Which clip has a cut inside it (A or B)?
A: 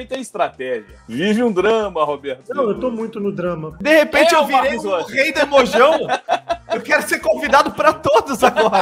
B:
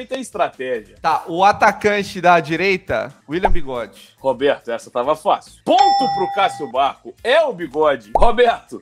A